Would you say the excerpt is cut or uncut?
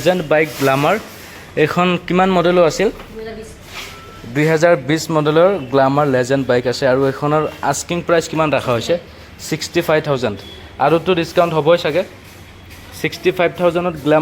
uncut